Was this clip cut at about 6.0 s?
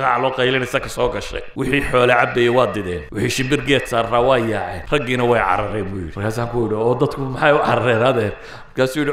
yes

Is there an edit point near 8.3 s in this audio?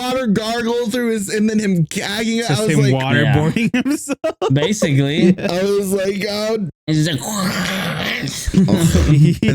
no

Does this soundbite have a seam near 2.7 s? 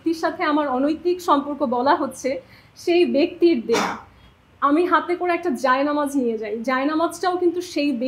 no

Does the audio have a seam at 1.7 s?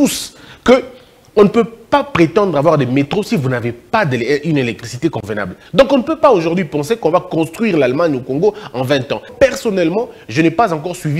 no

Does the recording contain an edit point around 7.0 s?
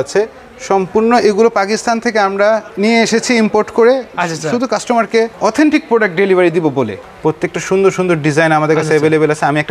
yes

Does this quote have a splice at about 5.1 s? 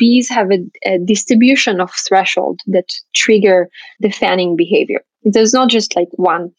yes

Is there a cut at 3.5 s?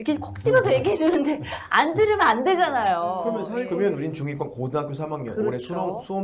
yes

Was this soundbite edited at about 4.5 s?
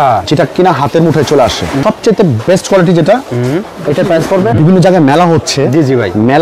yes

